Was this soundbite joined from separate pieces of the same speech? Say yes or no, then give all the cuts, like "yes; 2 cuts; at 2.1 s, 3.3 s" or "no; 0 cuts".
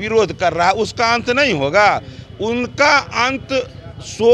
no; 0 cuts